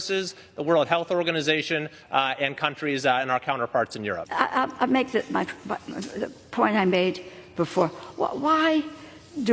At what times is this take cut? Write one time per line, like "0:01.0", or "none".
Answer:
0:04.2